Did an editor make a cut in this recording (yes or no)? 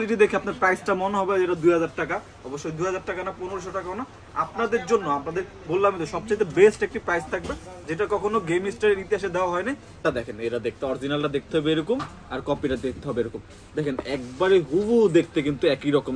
yes